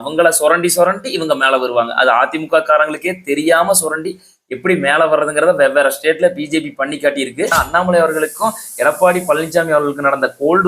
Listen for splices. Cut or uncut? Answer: cut